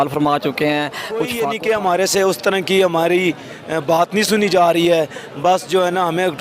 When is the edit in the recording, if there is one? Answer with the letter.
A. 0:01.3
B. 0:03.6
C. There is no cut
A